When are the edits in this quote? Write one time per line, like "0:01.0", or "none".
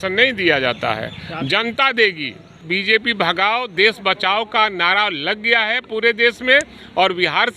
0:02.6